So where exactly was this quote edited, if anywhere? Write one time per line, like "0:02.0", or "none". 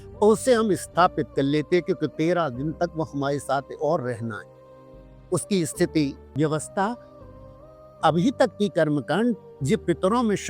0:06.2